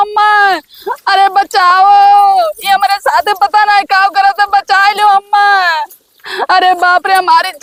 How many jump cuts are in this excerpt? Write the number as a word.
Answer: zero